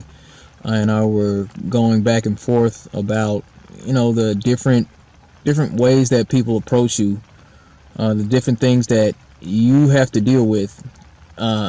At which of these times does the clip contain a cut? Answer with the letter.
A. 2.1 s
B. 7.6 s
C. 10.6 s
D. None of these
D